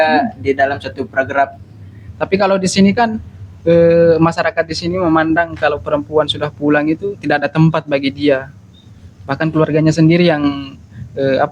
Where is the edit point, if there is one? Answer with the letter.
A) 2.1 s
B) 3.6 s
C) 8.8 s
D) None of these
A